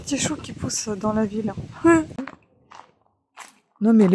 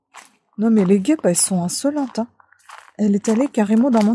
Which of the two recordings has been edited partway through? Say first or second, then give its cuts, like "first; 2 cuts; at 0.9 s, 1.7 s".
first; 1 cut; at 2.2 s